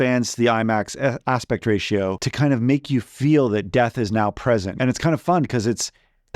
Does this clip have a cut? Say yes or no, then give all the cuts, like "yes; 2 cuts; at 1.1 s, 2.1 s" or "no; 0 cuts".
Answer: yes; 2 cuts; at 2.2 s, 4.7 s